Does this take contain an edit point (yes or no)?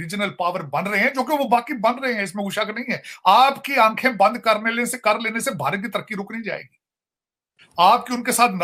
no